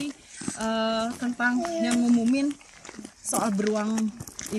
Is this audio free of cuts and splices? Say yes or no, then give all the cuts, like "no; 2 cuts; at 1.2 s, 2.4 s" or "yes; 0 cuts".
yes; 0 cuts